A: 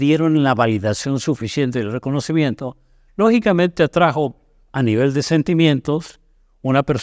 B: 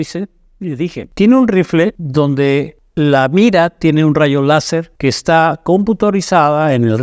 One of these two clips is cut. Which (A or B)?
B